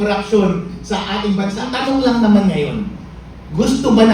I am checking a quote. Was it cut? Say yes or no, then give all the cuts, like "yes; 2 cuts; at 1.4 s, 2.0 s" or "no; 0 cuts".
yes; 1 cut; at 1.6 s